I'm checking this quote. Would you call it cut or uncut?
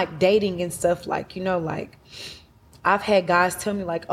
uncut